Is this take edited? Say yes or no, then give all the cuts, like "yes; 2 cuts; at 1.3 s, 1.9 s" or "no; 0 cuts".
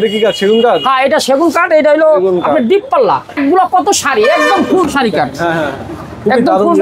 yes; 1 cut; at 3.3 s